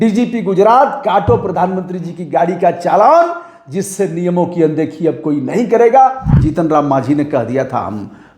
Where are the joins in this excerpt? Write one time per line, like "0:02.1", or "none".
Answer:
0:06.3